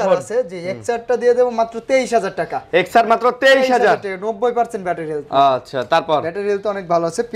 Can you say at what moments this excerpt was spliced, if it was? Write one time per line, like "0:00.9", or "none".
none